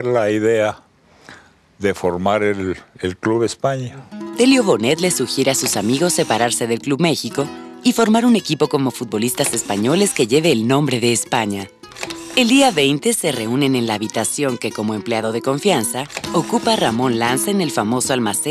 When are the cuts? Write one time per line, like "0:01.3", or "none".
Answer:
0:09.4